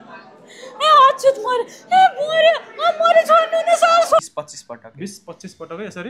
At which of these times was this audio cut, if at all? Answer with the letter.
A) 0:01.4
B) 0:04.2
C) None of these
B